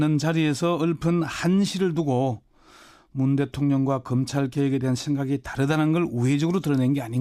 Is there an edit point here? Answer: yes; 1 cut; at 2.2 s

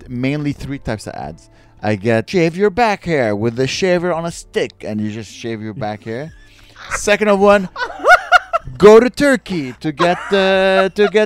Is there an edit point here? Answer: yes; 1 cut; at 2.3 s

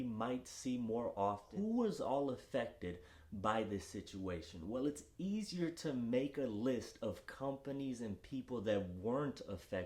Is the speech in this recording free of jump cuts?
no; 1 cut; at 1.5 s

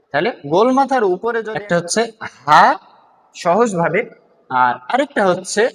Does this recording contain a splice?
yes; 1 cut; at 1.4 s

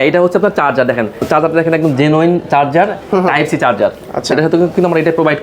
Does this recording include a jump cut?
yes; 1 cut; at 1.2 s

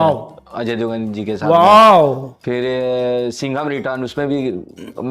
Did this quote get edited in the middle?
no; 0 cuts

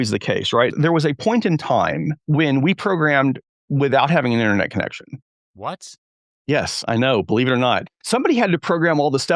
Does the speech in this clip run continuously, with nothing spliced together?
no; 3 cuts; at 0.7 s, 2.1 s, 5.4 s

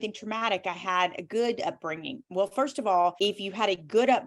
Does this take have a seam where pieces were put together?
yes; 1 cut; at 3.2 s

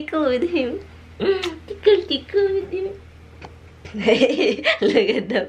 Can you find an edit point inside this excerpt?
no; 0 cuts

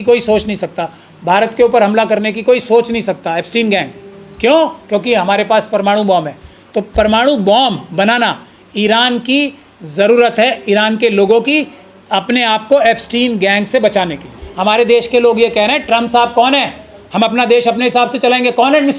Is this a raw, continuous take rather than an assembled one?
no; 1 cut; at 14.4 s

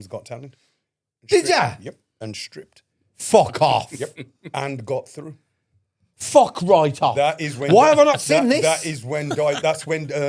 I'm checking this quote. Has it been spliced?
no; 0 cuts

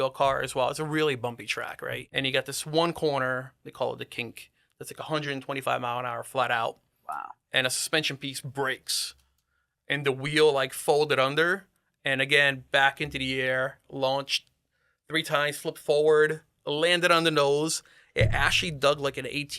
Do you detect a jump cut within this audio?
yes; 1 cut; at 2.0 s

